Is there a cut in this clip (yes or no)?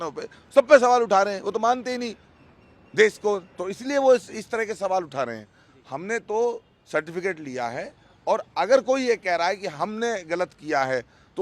no